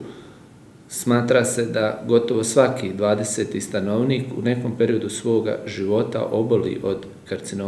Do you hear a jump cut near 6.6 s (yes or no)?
no